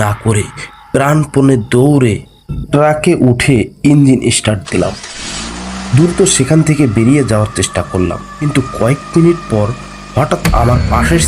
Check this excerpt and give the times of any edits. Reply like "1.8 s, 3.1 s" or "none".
8.3 s